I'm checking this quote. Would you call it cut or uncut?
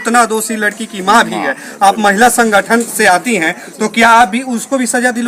uncut